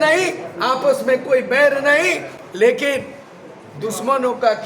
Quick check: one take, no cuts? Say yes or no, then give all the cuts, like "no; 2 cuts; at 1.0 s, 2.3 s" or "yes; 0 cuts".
yes; 0 cuts